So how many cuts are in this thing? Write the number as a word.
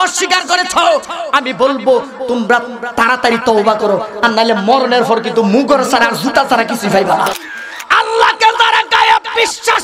one